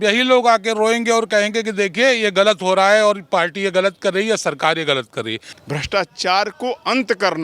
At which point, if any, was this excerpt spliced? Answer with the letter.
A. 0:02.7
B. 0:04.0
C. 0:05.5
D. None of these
C